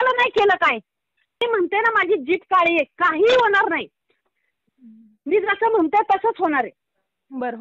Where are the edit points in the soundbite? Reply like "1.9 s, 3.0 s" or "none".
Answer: 1.4 s